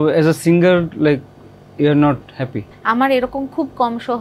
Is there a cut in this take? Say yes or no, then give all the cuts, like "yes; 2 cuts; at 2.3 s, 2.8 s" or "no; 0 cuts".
yes; 1 cut; at 2.7 s